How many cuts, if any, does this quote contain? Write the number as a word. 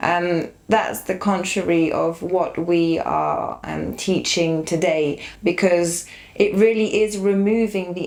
zero